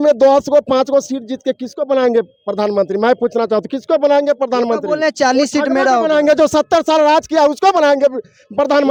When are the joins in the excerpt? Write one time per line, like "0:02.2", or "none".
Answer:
none